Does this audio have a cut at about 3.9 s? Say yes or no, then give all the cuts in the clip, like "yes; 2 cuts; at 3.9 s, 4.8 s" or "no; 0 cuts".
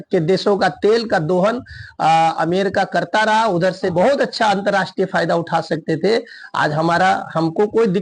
yes; 1 cut; at 3.9 s